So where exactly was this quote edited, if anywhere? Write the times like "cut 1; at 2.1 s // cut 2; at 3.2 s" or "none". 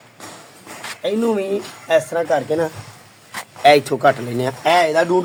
none